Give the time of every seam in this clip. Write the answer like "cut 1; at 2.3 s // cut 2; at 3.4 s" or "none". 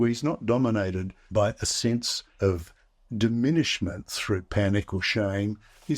cut 1; at 1.1 s // cut 2; at 2.2 s